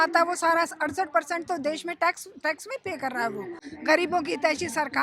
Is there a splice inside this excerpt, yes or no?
yes